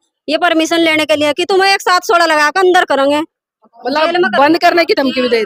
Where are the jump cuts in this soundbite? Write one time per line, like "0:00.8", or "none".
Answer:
none